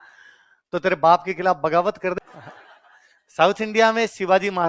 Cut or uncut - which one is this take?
cut